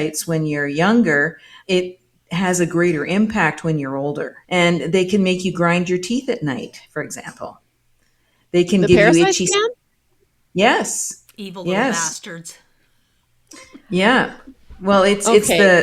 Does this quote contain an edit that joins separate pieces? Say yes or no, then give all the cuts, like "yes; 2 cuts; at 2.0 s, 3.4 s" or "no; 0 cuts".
yes; 2 cuts; at 1.5 s, 4.3 s